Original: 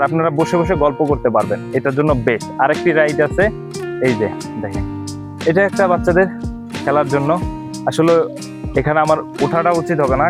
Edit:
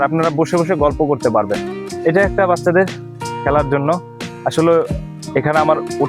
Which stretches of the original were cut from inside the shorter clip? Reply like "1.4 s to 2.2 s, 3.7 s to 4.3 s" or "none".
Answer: 1.6 s to 5.0 s